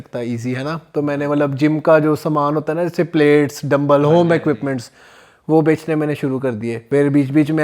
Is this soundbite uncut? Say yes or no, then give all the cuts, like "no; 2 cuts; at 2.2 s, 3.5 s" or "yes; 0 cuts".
no; 1 cut; at 6.7 s